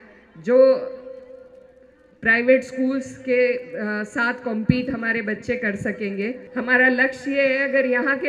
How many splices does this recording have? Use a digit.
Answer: 1